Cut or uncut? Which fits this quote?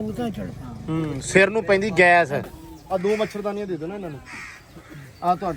cut